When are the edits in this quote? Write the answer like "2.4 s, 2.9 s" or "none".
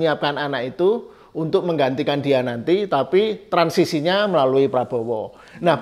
none